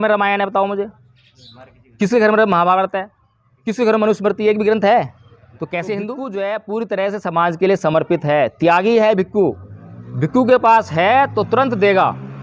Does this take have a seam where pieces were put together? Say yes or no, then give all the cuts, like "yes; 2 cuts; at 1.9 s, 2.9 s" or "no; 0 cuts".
yes; 1 cut; at 6.2 s